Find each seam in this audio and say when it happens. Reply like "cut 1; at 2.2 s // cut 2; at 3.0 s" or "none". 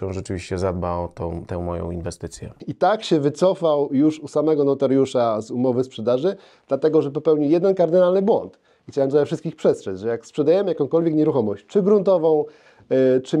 cut 1; at 2.6 s